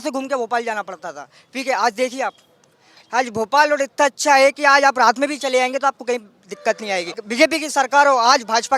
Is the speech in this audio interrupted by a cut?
yes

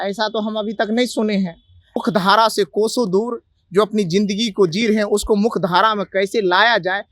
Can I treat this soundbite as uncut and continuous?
no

